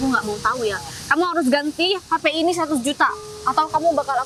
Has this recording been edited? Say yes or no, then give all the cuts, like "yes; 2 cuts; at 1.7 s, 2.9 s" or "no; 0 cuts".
no; 0 cuts